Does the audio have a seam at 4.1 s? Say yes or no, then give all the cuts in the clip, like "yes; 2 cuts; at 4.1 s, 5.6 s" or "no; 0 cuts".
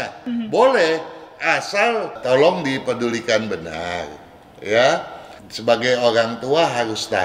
no; 1 cut; at 2.2 s